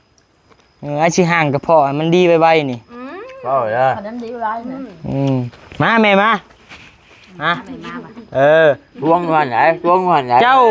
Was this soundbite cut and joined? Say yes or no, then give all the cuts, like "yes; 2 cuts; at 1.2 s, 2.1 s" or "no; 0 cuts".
no; 0 cuts